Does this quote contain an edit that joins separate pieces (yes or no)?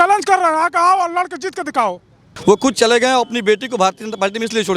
yes